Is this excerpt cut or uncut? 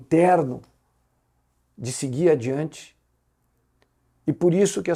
uncut